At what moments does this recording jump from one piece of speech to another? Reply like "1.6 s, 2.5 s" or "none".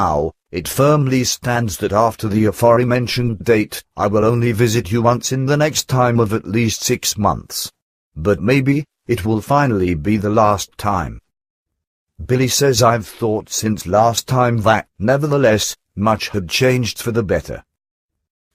7.0 s